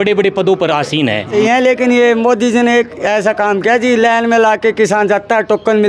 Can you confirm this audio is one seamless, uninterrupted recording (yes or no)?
no